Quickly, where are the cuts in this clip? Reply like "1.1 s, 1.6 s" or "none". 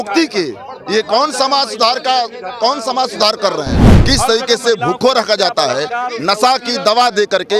3.9 s